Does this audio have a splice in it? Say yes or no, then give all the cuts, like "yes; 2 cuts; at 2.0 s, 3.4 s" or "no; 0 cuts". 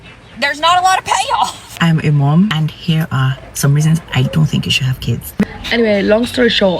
yes; 2 cuts; at 1.6 s, 5.5 s